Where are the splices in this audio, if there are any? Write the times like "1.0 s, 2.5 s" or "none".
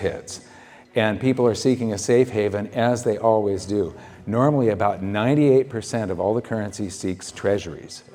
none

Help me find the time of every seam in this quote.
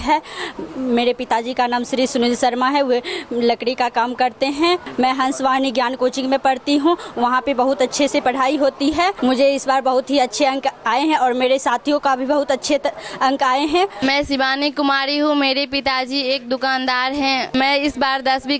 14.0 s

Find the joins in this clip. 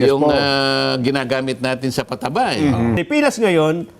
3.0 s

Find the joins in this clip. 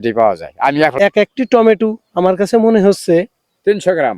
0.9 s

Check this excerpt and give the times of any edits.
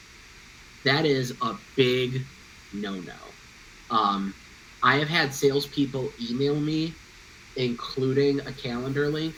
none

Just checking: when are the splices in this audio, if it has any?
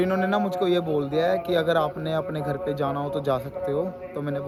none

